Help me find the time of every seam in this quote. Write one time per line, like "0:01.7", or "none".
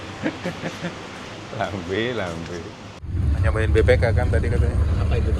0:01.2
0:03.1

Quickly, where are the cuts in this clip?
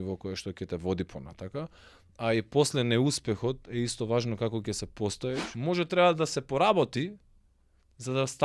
0:05.5

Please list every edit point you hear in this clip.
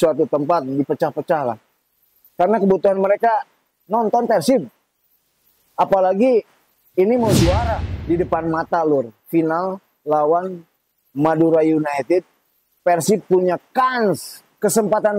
0:07.9

